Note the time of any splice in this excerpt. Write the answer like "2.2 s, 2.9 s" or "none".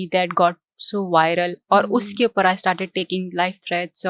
none

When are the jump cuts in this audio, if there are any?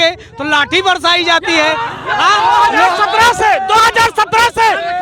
2.9 s

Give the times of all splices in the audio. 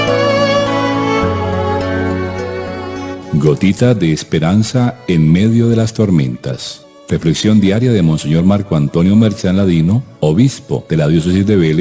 7.3 s

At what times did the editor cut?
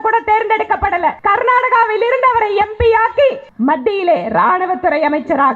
1.2 s, 3.5 s

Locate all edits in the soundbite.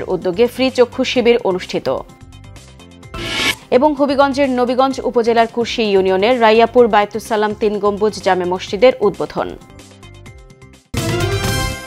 10.9 s

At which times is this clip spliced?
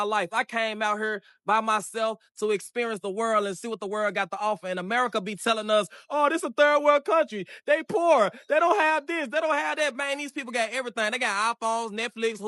none

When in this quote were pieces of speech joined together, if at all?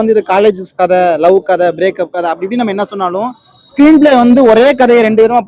none

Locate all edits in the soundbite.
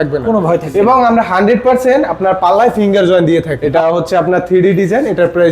3.6 s

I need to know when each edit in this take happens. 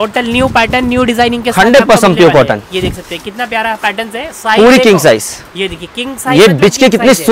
none

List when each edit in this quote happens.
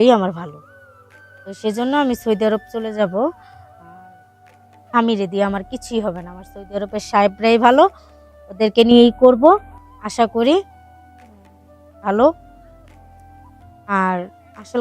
12.4 s, 13.8 s

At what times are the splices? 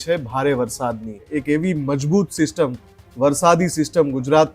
1.3 s

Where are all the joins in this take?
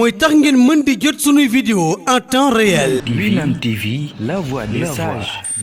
3.0 s

